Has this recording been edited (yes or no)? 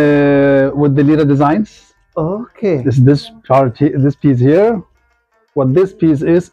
no